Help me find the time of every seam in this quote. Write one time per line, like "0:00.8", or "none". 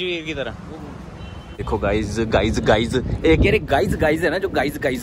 0:01.6